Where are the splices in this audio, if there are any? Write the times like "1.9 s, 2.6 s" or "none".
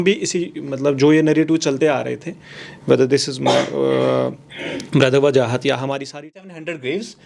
6.2 s